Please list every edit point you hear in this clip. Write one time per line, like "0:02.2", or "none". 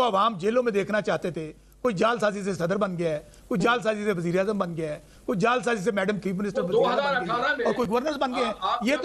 none